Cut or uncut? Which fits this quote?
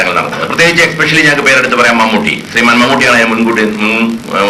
uncut